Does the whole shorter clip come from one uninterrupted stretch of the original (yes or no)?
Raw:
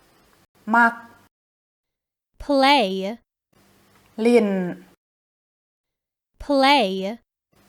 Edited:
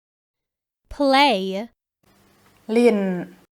yes